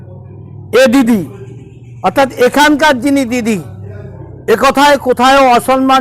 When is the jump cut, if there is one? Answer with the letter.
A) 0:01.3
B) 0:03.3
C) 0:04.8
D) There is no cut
D